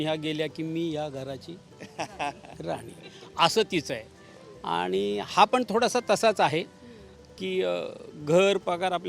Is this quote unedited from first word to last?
yes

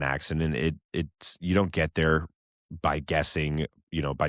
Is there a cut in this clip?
no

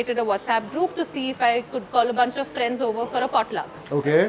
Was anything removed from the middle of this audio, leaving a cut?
no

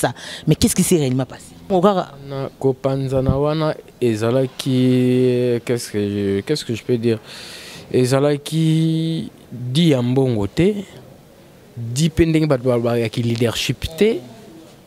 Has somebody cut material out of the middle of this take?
yes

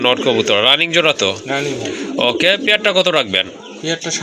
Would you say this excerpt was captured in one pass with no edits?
yes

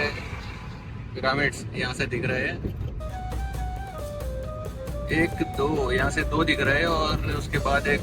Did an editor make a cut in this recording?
no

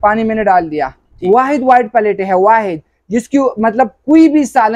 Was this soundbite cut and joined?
yes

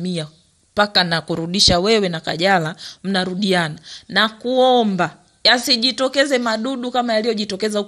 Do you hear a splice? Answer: no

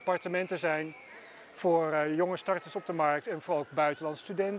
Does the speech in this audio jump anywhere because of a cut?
no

